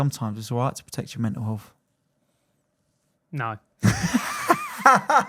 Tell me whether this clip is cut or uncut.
uncut